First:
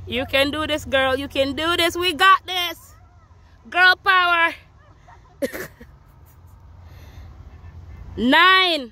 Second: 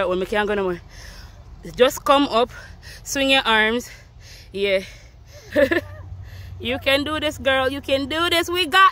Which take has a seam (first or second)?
second